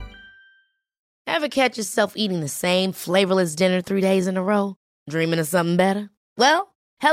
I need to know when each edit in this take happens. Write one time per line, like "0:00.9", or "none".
0:01.1